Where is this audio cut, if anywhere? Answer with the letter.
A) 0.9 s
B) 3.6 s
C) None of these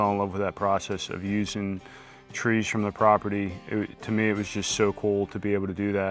C